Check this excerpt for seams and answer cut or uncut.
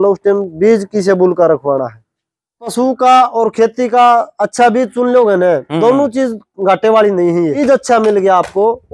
cut